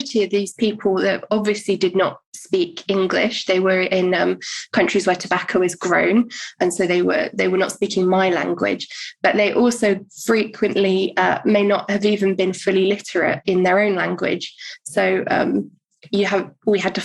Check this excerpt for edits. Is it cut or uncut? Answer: uncut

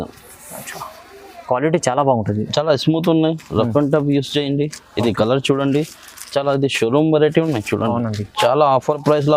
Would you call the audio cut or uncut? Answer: uncut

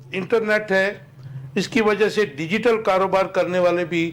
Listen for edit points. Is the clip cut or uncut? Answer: uncut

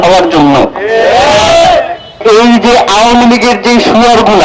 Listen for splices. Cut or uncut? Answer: cut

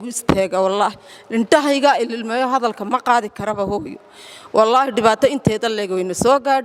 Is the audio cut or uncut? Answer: uncut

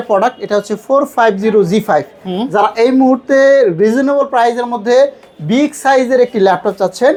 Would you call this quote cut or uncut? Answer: uncut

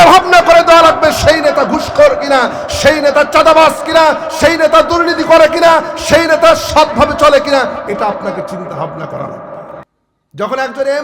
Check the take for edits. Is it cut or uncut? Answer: cut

